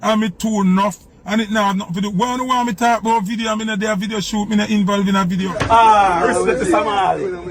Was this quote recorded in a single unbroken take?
no; 1 cut; at 5.5 s

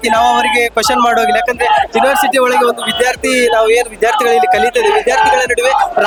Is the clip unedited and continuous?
yes; 0 cuts

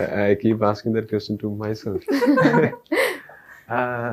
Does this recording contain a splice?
no; 0 cuts

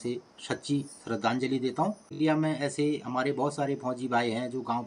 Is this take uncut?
no; 1 cut; at 2.1 s

